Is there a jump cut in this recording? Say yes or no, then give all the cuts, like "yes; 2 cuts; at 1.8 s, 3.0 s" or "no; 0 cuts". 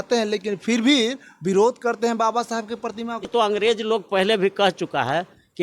yes; 1 cut; at 3.3 s